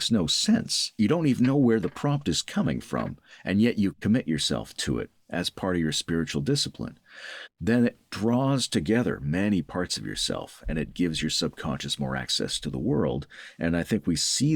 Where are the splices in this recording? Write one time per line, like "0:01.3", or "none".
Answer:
0:00.9